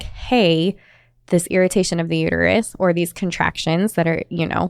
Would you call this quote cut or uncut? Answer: uncut